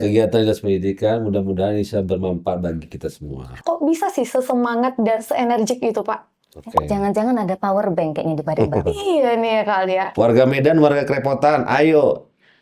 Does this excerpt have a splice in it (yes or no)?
yes